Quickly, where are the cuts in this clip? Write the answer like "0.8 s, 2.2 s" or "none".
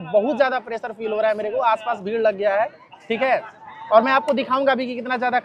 none

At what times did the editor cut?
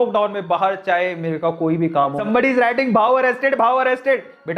2.3 s

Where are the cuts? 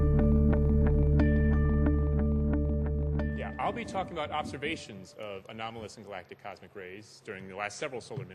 none

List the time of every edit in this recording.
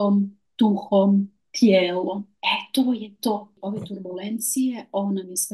3.6 s

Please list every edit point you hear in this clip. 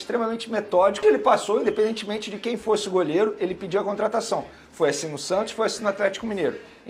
1.0 s

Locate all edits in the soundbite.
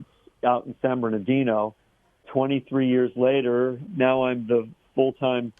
2.3 s, 3.9 s

